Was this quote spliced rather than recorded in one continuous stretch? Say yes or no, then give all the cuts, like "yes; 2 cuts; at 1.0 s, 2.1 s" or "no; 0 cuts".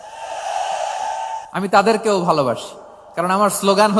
yes; 1 cut; at 1.4 s